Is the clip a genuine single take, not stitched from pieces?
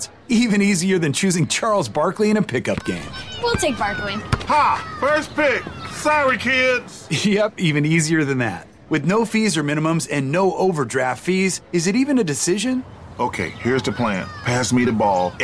yes; 0 cuts

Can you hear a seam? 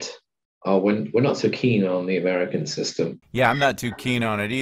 yes; 1 cut; at 3.2 s

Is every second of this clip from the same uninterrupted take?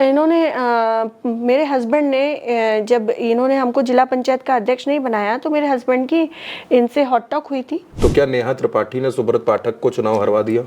no; 1 cut; at 7.9 s

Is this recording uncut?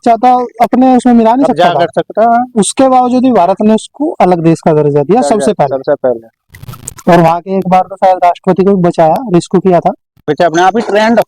no; 1 cut; at 10.3 s

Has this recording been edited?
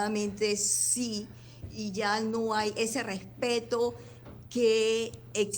no; 0 cuts

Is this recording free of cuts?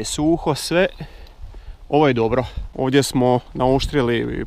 no; 1 cut; at 2.6 s

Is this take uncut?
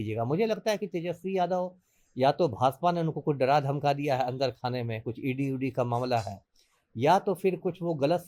yes; 0 cuts

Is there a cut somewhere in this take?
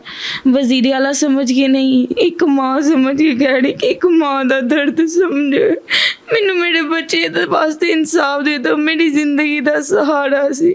no; 0 cuts

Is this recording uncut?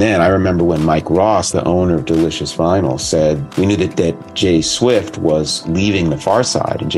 yes; 0 cuts

